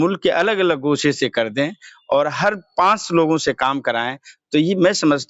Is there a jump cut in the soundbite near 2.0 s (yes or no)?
no